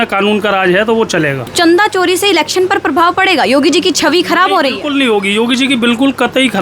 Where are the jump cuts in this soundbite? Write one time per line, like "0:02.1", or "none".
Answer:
0:01.4